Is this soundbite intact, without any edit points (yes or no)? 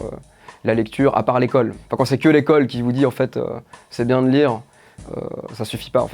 no